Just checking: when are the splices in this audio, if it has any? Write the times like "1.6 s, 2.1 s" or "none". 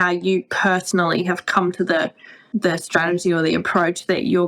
2.4 s